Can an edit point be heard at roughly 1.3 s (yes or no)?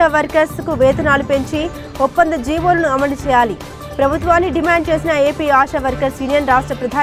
no